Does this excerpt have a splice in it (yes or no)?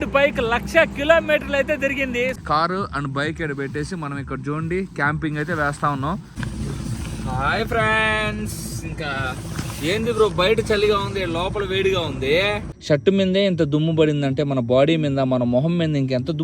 yes